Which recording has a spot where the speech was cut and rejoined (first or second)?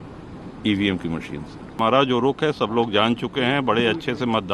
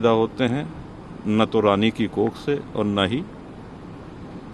first